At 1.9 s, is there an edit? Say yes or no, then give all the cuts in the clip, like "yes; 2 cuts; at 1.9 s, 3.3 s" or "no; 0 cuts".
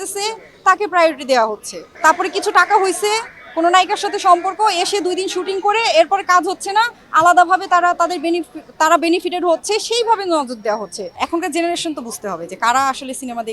yes; 2 cuts; at 1.9 s, 11.1 s